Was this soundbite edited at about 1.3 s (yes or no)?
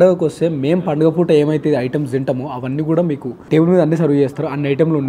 no